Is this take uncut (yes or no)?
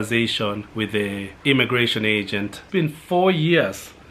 no